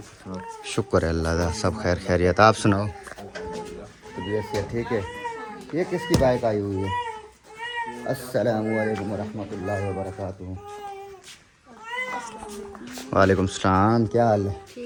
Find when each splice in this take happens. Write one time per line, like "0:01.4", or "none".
none